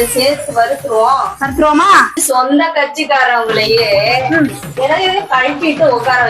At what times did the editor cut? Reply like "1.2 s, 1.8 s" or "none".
2.2 s